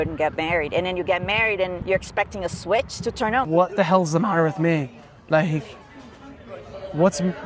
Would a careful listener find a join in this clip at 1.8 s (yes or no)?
yes